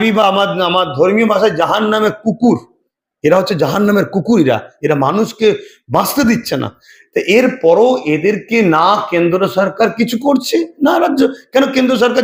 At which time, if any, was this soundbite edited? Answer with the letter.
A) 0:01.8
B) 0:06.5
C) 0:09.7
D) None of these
D